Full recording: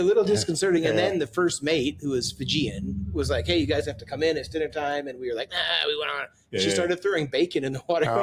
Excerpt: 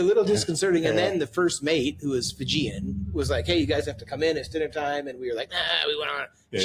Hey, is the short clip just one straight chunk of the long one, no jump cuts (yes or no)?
yes